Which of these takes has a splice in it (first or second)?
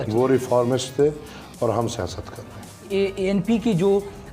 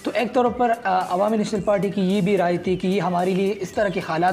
first